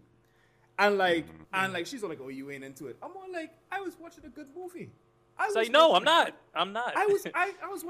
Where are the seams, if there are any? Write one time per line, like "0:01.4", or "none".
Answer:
0:01.3